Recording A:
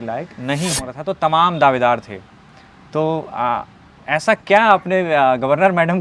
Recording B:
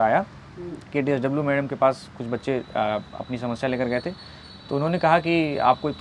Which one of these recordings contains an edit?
A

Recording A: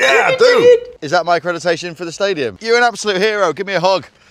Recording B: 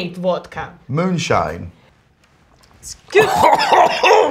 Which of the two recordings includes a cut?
A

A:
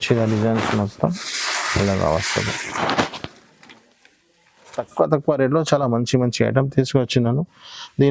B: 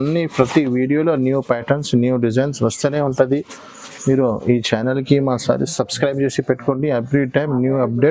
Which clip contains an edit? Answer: A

